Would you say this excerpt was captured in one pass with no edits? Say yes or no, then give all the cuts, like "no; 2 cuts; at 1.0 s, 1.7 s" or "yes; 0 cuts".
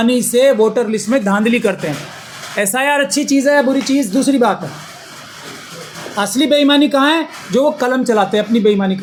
yes; 0 cuts